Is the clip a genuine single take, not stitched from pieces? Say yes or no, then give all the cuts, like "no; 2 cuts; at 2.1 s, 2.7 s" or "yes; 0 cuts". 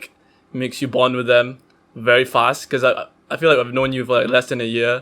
yes; 0 cuts